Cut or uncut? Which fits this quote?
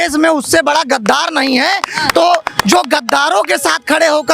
uncut